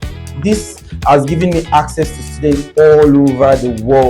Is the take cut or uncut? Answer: uncut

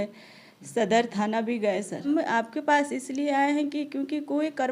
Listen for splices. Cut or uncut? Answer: cut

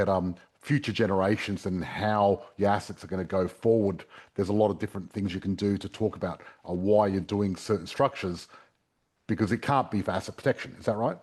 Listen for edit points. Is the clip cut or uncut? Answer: uncut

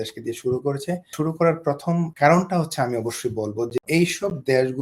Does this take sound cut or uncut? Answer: cut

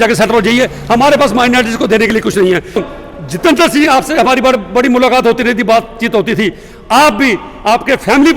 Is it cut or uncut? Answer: cut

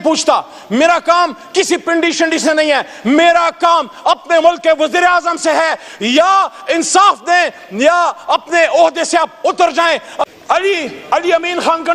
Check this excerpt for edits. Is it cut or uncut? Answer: cut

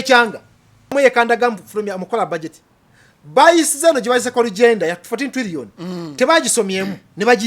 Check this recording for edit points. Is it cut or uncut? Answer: cut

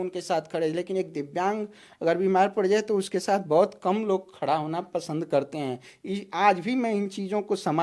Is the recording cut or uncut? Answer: uncut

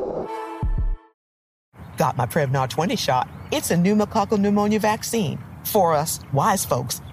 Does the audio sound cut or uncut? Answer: cut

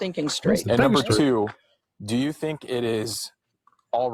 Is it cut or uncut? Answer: uncut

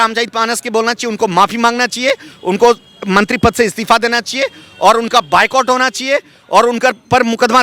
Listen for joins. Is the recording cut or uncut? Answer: uncut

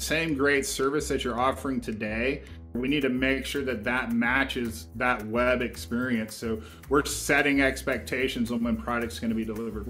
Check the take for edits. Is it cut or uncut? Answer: cut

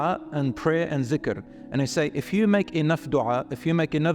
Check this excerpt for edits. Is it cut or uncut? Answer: uncut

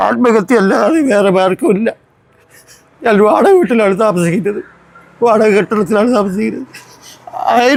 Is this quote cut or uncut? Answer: uncut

